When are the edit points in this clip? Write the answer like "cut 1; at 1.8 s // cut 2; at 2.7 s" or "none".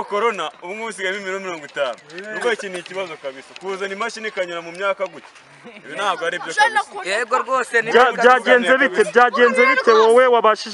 none